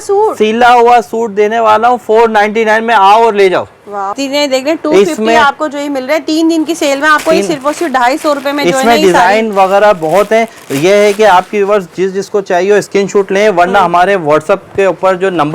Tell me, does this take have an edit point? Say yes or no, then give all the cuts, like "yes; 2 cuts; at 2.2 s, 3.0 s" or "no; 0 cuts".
yes; 1 cut; at 4.2 s